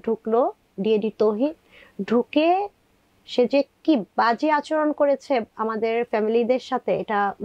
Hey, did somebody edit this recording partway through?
no; 0 cuts

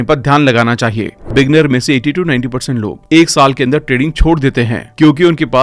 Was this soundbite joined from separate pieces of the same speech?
yes; 1 cut; at 1.2 s

